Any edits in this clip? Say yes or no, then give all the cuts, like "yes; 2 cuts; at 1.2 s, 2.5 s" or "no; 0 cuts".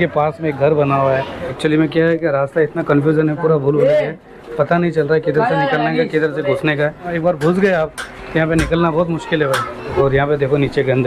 yes; 3 cuts; at 1.5 s, 7.1 s, 9.9 s